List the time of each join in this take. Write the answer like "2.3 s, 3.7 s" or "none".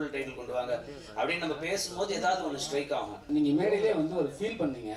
3.2 s